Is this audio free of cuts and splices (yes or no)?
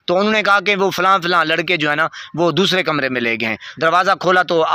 no